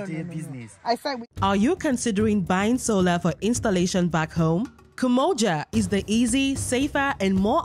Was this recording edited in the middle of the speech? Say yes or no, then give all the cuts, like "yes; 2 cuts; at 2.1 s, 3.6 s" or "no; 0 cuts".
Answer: yes; 1 cut; at 1.2 s